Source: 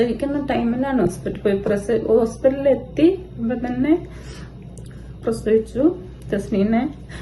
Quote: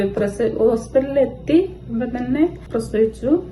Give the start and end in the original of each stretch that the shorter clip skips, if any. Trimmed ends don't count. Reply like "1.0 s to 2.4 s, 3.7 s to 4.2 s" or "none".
4.1 s to 5.1 s